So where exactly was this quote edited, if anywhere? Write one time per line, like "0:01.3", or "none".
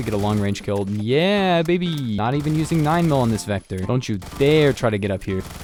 none